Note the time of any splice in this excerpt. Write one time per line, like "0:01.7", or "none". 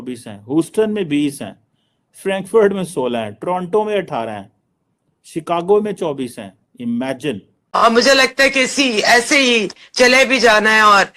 0:07.6